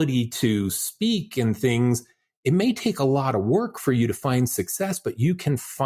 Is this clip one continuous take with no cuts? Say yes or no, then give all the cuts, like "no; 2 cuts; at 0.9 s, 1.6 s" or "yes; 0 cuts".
yes; 0 cuts